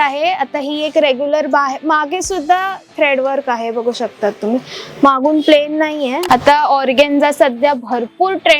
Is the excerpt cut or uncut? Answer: cut